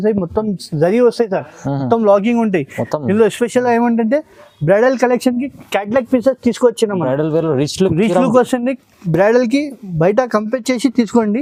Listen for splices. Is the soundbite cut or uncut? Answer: uncut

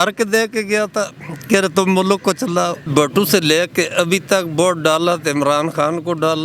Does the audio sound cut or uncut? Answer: cut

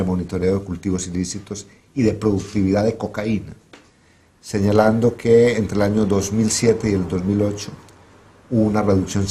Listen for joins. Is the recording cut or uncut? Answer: uncut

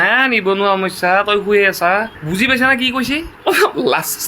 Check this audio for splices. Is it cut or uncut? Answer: cut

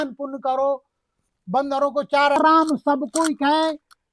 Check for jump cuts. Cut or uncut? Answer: cut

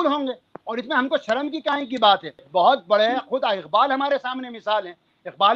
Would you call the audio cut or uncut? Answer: cut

